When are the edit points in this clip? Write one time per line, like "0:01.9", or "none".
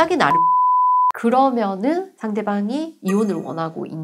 0:03.0